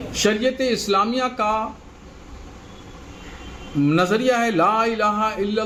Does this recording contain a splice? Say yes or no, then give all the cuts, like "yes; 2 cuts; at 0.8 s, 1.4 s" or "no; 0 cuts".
no; 0 cuts